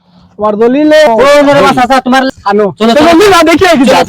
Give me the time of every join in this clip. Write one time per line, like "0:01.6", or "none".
0:01.1
0:02.3